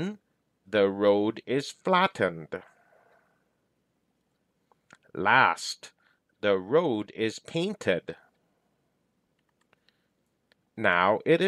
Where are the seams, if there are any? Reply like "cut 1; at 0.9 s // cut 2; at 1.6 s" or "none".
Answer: cut 1; at 3.9 s // cut 2; at 9.3 s